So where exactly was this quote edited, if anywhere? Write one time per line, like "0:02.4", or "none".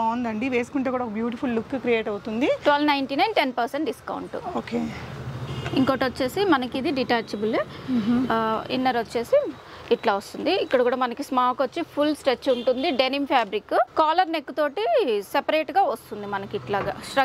none